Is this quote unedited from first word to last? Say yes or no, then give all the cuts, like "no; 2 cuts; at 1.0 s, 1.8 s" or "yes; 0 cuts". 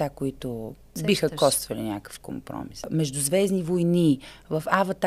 no; 2 cuts; at 0.9 s, 2.8 s